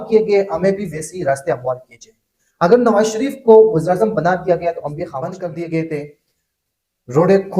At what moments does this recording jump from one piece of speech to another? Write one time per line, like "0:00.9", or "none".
0:05.3